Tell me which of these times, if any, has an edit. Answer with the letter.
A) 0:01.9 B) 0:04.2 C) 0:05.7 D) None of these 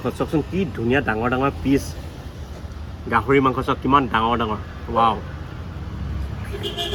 D